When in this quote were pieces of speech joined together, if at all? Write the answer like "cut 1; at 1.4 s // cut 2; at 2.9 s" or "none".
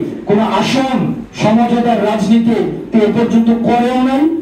none